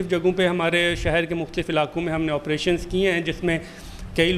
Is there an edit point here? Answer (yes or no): no